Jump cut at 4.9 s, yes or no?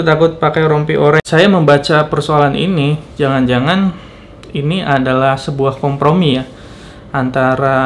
no